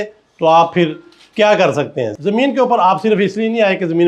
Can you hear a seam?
yes; 1 cut; at 2.1 s

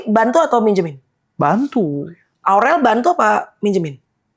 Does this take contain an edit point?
yes; 1 cut; at 2.4 s

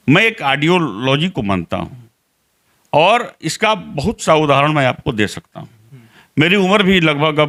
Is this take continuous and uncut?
yes; 0 cuts

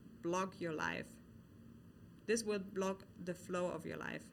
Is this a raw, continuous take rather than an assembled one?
yes; 0 cuts

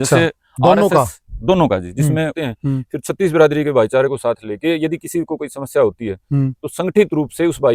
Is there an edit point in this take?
yes; 1 cut; at 2.3 s

